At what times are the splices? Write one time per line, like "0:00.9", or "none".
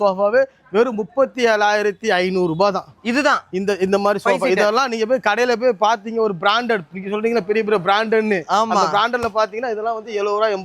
none